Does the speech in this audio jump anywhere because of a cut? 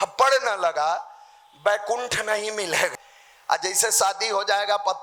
yes; 1 cut; at 2.9 s

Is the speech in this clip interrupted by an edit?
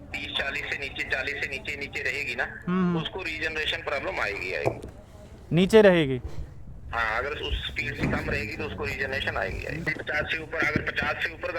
yes; 1 cut; at 9.9 s

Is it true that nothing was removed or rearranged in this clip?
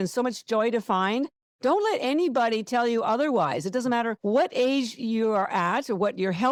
yes; 0 cuts

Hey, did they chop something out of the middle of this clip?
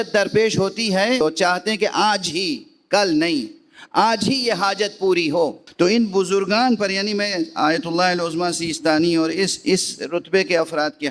yes; 2 cuts; at 1.2 s, 5.6 s

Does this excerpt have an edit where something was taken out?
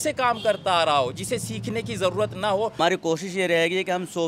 yes; 1 cut; at 2.7 s

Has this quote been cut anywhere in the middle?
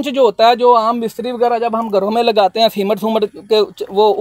no; 0 cuts

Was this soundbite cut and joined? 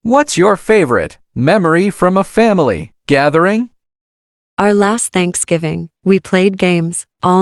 no; 0 cuts

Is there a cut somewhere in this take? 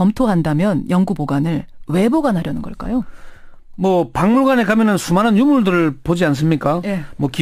no; 0 cuts

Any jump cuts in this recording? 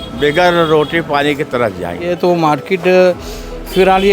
yes; 1 cut; at 2.2 s

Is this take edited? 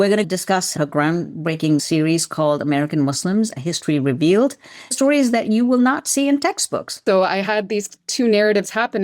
yes; 1 cut; at 7.0 s

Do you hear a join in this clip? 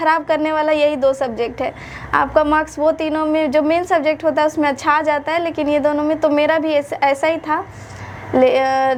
no; 0 cuts

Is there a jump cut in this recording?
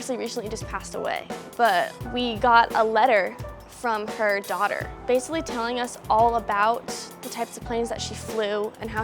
no; 0 cuts

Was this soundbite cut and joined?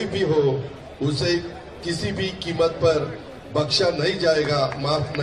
no; 0 cuts

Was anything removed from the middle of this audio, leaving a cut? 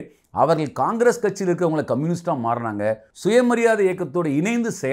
yes; 1 cut; at 3.1 s

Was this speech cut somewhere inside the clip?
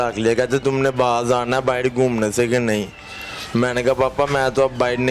no; 0 cuts

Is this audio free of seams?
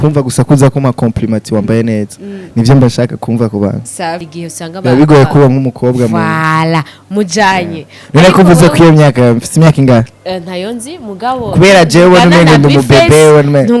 no; 1 cut; at 4.3 s

